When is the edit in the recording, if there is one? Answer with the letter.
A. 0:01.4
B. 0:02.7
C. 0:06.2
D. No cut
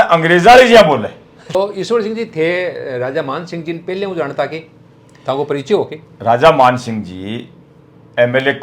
A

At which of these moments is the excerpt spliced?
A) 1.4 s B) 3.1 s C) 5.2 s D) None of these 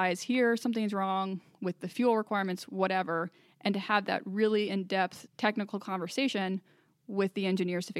C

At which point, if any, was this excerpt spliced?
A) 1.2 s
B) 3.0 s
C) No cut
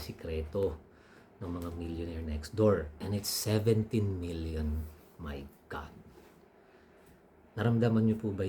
B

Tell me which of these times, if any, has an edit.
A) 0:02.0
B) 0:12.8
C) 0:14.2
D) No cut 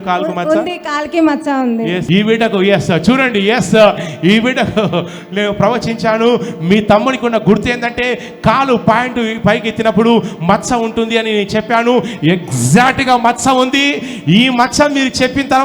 A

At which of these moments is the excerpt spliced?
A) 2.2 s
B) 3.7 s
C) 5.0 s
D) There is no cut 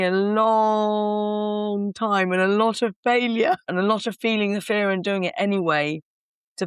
B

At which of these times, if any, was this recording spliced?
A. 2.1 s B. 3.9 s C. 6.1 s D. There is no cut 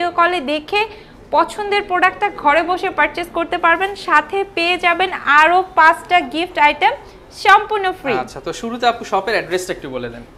D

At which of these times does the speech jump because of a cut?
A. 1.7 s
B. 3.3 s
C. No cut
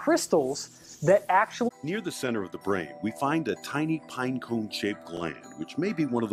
C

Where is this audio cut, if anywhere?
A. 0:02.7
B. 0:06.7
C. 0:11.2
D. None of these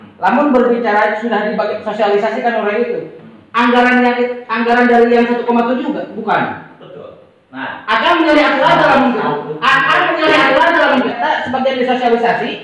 C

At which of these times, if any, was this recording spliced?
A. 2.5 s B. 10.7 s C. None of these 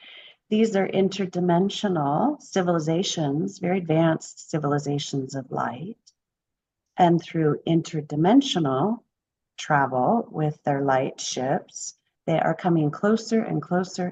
C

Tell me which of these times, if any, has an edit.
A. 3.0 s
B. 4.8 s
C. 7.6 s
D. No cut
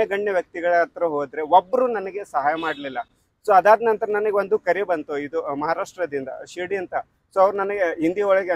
D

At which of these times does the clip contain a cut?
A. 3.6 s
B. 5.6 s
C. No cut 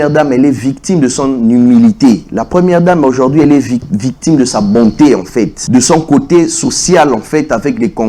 B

